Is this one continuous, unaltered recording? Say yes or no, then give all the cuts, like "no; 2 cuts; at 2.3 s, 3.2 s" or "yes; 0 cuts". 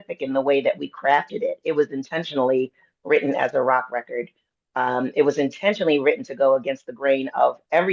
yes; 0 cuts